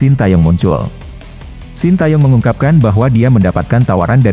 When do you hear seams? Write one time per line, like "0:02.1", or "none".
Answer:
none